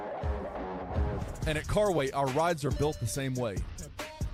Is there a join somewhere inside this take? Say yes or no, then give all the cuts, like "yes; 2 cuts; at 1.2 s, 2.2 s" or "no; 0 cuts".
no; 0 cuts